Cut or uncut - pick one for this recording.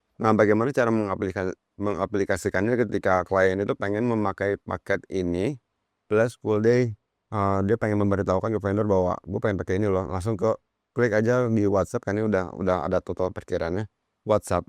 cut